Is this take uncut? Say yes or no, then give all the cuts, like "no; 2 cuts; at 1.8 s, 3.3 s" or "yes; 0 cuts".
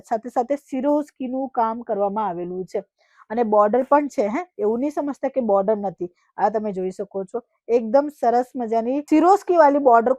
yes; 0 cuts